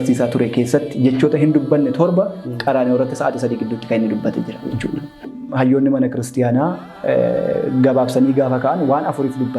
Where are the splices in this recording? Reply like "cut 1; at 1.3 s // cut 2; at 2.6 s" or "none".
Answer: cut 1; at 5.3 s